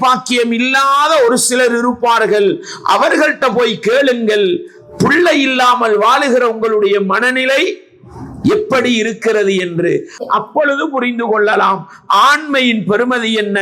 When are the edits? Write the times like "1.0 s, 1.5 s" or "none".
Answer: none